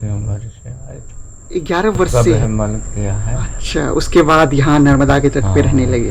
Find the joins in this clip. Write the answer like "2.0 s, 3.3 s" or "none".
2.4 s